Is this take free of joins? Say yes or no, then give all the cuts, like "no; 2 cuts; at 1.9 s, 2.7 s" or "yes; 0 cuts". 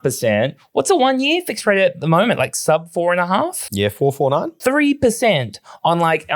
no; 1 cut; at 4.5 s